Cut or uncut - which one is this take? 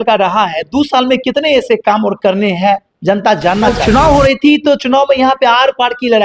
cut